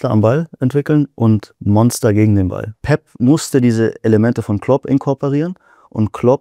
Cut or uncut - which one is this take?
cut